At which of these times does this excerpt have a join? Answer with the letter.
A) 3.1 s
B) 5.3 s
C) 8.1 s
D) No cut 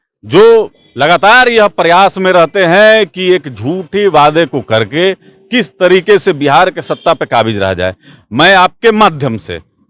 D